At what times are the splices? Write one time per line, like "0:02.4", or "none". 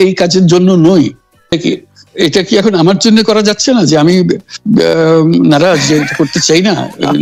0:01.5